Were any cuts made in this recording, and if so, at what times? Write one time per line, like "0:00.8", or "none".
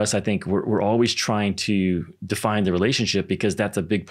none